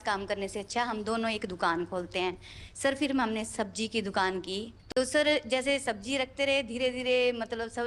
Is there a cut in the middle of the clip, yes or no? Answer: no